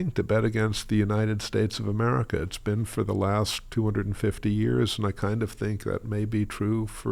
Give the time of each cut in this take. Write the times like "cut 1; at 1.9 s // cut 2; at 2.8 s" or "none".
none